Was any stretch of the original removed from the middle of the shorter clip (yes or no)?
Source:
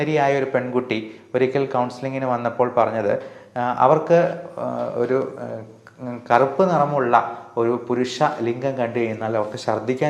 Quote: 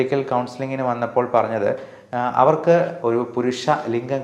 yes